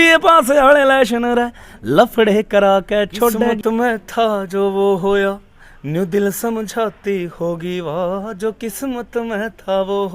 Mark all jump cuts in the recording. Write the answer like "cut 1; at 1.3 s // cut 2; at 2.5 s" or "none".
cut 1; at 3.6 s